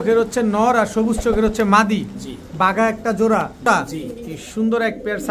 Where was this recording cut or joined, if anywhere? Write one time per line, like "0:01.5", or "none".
0:03.7

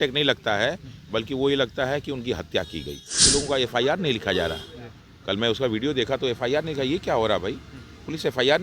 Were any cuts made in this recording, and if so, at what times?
0:03.2

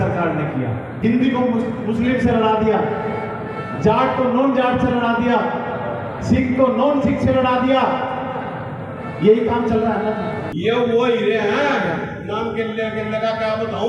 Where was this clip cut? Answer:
0:00.9
0:10.5

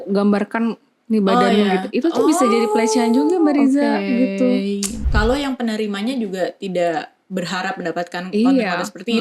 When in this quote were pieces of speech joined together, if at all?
0:04.9

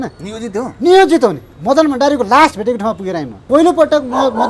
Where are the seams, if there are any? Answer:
0:01.5
0:03.4

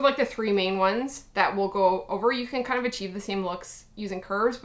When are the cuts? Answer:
none

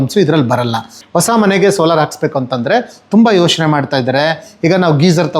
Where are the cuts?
0:01.0

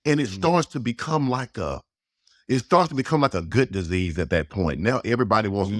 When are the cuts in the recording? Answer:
none

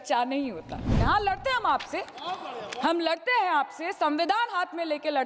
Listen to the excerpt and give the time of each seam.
0:00.9

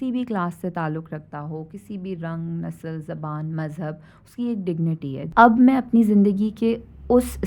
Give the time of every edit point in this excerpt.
0:05.3

